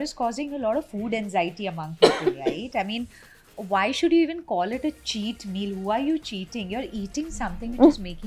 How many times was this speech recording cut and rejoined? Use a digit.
0